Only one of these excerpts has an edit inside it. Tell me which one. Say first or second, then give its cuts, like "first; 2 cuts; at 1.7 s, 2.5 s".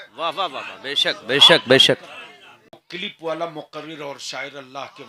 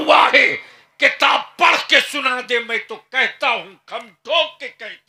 first; 1 cut; at 2.8 s